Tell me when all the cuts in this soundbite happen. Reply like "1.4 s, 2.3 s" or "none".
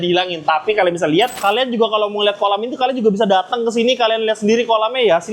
1.4 s